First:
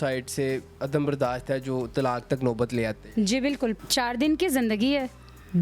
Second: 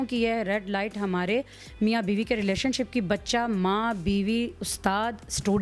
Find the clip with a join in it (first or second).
first